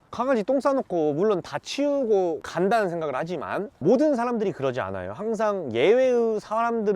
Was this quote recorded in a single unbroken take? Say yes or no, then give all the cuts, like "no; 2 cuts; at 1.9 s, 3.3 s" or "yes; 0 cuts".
yes; 0 cuts